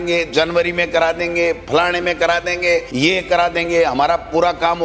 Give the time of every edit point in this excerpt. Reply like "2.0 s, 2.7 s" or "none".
2.9 s